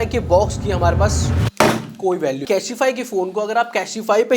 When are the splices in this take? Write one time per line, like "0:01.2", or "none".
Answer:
0:02.4

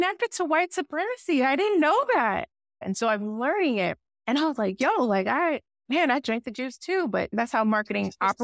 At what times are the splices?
0:02.8
0:04.1
0:05.7
0:07.3

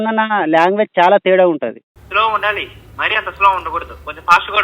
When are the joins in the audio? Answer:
0:01.9

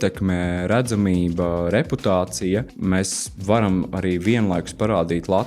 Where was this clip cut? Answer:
0:02.7

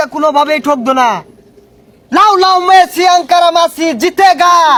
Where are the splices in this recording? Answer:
none

